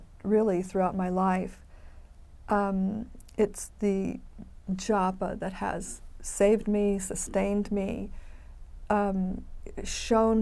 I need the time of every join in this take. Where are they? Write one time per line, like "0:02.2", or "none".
none

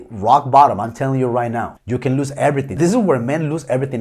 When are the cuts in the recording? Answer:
none

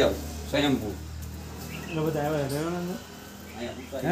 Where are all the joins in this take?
none

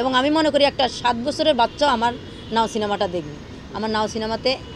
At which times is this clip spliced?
none

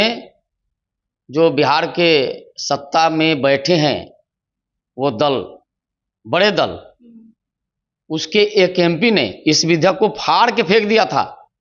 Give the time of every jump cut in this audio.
none

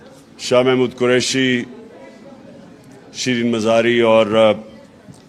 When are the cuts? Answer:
0:01.4

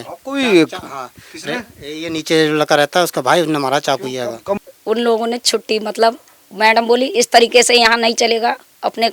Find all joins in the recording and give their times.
0:04.6

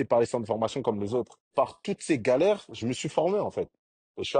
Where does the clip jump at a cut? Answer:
0:01.5

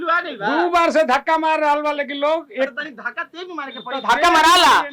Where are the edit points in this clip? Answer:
none

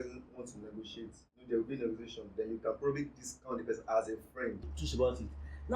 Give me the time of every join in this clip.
0:04.7

